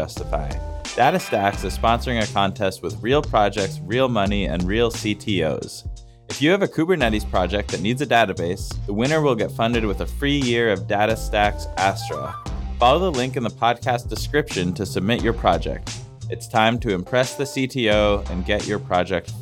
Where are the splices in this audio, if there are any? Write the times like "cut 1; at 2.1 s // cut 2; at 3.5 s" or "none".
none